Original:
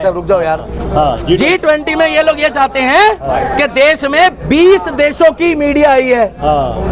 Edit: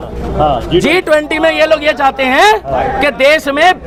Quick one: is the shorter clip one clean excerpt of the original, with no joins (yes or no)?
yes